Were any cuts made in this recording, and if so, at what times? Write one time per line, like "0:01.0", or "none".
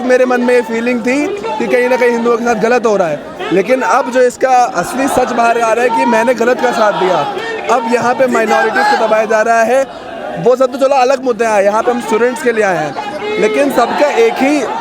none